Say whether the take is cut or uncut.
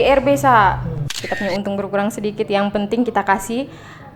cut